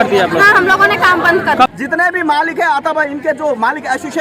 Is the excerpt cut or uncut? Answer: cut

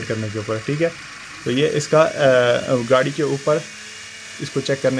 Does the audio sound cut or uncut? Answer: uncut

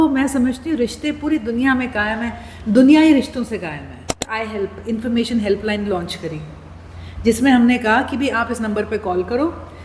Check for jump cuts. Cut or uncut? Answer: cut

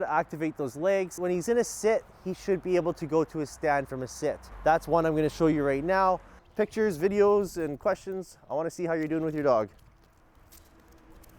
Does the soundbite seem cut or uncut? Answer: cut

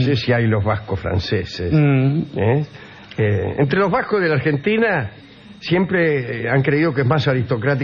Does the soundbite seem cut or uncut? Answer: uncut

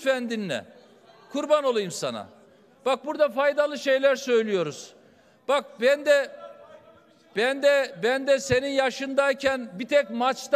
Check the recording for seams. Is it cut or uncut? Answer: uncut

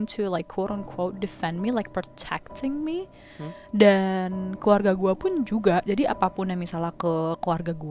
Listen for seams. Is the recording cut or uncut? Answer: uncut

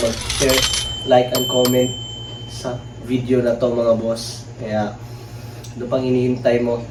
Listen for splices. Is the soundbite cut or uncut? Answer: uncut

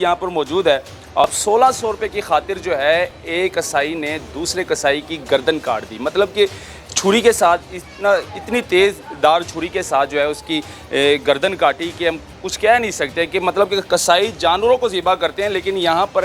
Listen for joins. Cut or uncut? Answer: cut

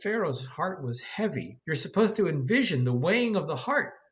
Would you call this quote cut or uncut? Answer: cut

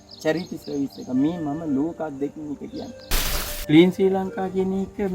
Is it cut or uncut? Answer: cut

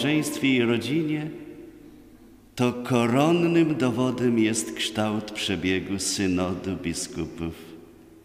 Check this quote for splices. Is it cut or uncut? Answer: uncut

